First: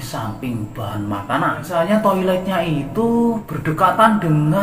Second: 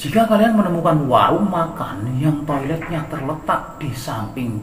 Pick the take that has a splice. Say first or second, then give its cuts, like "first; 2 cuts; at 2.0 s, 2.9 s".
first; 2 cuts; at 1.6 s, 3.5 s